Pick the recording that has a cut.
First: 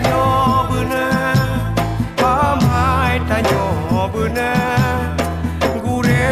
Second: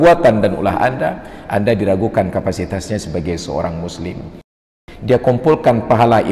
second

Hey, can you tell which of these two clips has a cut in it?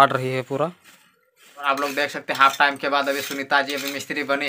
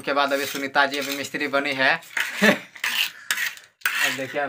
first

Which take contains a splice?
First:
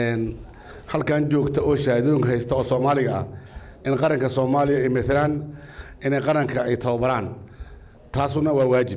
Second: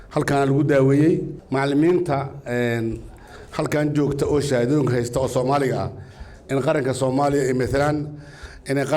second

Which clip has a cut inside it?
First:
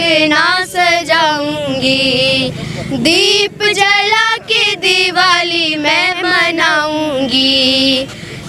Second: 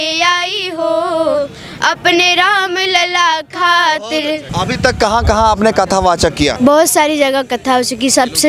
second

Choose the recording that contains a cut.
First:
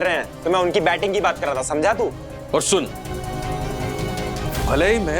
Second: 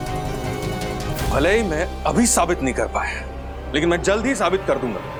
first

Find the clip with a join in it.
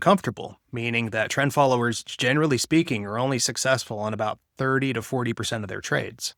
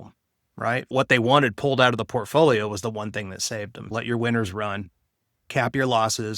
second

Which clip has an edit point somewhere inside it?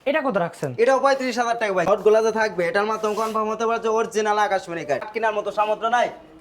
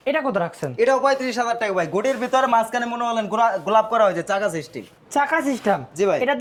first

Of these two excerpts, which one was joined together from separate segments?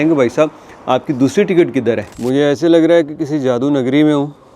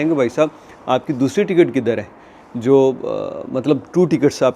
first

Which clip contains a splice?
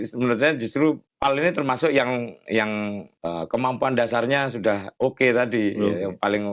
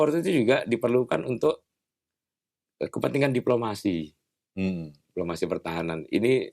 first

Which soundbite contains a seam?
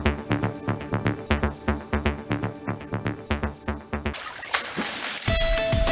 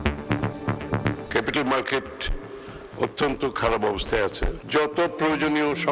second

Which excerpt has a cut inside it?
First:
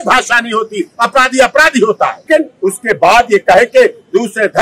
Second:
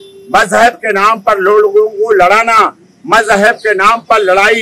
first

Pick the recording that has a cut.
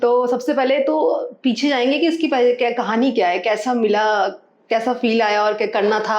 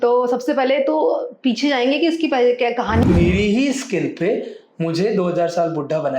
second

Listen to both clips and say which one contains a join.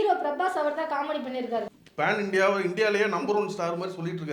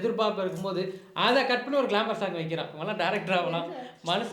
first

